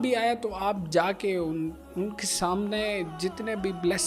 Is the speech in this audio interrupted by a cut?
no; 0 cuts

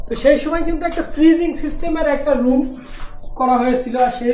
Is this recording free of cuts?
yes; 0 cuts

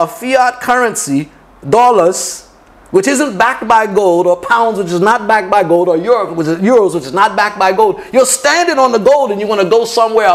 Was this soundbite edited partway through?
no; 0 cuts

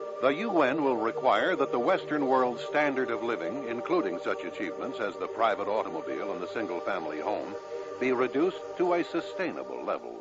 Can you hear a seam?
no; 0 cuts

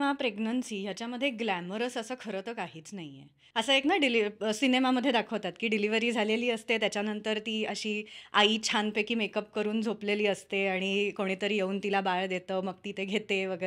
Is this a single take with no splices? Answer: no; 1 cut; at 3.4 s

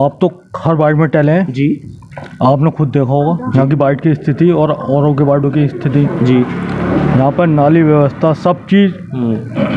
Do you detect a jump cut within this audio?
no; 0 cuts

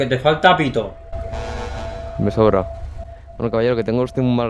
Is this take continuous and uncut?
yes; 0 cuts

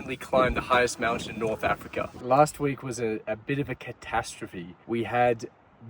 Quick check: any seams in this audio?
yes; 2 cuts; at 2.1 s, 4.7 s

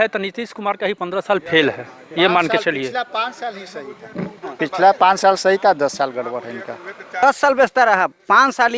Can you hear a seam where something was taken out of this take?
yes; 1 cut; at 7.1 s

